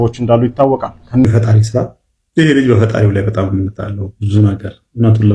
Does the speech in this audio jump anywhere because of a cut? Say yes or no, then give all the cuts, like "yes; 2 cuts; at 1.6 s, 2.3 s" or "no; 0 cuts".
yes; 1 cut; at 1.2 s